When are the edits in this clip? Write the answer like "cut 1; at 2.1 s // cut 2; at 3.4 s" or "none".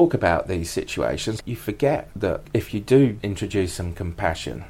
cut 1; at 1.4 s // cut 2; at 2.4 s // cut 3; at 3.2 s